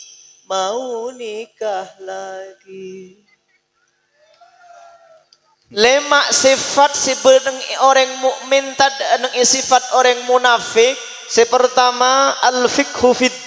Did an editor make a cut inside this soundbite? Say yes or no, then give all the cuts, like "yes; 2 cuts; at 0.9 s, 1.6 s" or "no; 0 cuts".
yes; 1 cut; at 5.8 s